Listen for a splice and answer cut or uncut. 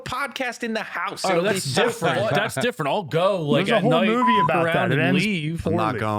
uncut